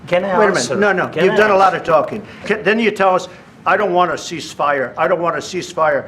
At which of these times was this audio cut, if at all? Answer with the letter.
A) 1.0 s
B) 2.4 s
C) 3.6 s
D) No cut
B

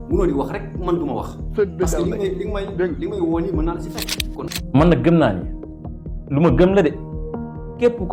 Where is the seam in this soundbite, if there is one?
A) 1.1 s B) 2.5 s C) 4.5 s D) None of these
C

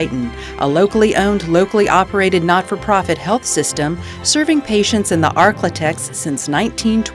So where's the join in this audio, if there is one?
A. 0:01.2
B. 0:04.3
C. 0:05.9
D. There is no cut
D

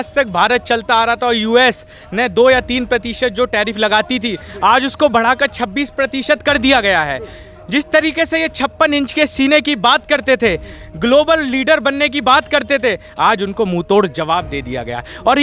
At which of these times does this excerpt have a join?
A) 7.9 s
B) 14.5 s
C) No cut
C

